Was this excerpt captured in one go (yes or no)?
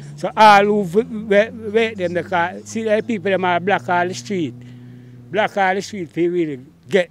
yes